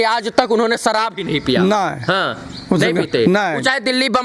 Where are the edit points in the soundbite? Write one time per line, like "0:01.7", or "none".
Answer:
none